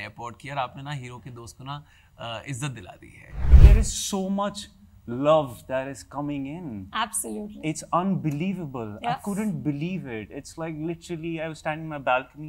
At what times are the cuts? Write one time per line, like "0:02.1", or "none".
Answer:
0:03.5

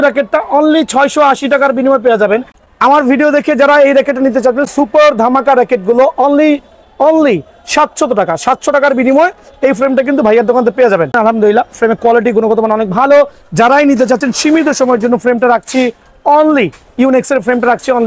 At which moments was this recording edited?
0:02.6
0:11.1

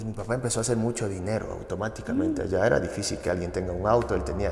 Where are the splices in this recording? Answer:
none

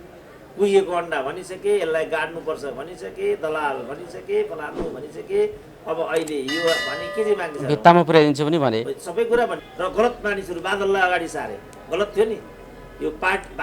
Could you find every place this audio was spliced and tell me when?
0:09.6

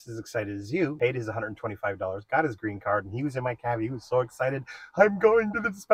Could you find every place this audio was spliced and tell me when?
none

